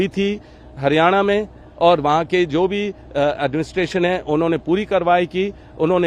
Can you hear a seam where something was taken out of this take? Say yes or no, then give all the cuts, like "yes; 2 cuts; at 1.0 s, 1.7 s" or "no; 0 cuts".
no; 0 cuts